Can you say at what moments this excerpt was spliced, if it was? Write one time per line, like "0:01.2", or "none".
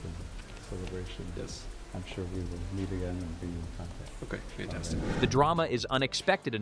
none